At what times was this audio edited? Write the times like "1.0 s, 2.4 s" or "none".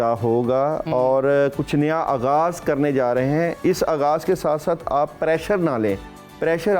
none

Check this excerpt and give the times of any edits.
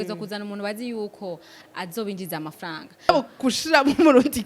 3.1 s

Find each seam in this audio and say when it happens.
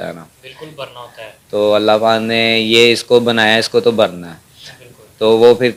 none

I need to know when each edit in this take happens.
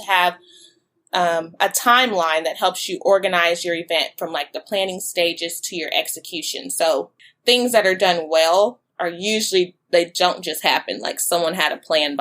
7.2 s

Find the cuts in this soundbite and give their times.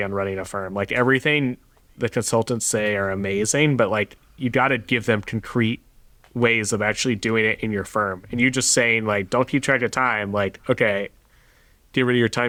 none

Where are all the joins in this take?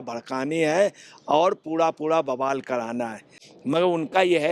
3.4 s

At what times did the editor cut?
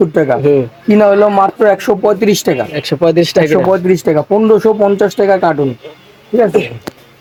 none

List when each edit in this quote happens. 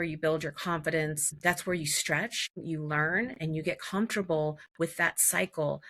1.3 s, 2.6 s

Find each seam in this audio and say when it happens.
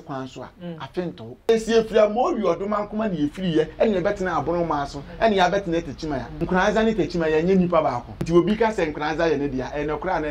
1.5 s, 6.3 s, 8.1 s

